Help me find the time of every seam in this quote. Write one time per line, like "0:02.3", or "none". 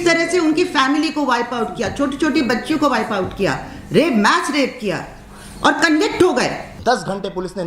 0:06.7